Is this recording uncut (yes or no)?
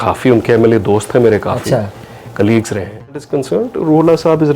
no